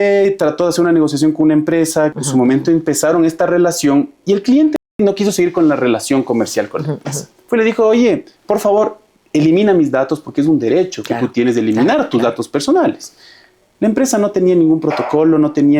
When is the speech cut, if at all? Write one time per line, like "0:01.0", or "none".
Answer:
0:02.2
0:04.9
0:08.3